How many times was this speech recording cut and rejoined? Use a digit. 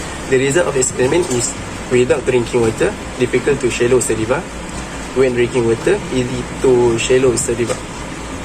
0